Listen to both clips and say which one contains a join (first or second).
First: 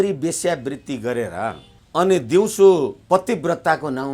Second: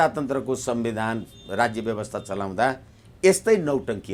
first